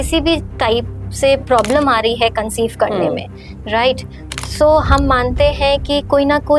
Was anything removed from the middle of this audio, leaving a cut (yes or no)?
no